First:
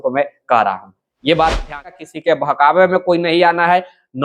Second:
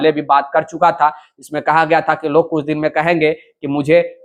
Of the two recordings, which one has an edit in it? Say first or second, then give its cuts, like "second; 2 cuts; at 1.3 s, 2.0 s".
first; 1 cut; at 2.1 s